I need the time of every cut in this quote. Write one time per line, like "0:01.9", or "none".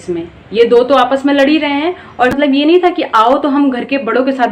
0:02.3